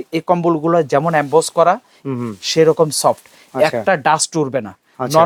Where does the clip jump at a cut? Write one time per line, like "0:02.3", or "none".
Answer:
none